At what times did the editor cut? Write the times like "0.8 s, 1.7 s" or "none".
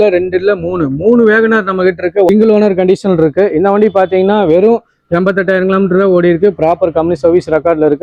2.3 s